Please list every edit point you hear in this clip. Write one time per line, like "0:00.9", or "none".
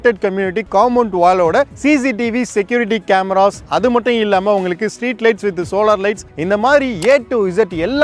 none